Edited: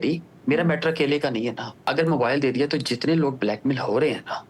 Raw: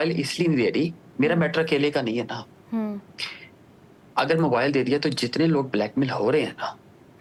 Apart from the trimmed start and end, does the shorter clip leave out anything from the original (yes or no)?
yes